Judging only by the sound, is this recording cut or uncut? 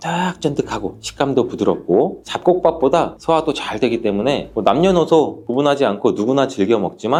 uncut